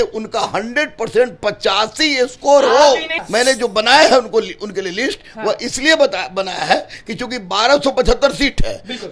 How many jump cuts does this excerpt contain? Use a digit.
1